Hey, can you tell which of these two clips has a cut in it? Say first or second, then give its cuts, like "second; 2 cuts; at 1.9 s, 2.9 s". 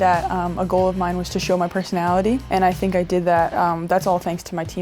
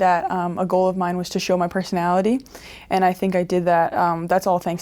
first; 1 cut; at 2.4 s